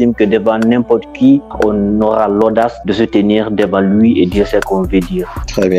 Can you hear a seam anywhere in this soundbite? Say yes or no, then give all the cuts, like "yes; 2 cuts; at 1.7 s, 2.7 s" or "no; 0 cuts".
yes; 1 cut; at 2.8 s